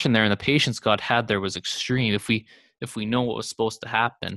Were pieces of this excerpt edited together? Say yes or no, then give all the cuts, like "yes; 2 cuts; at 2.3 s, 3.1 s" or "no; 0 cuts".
no; 0 cuts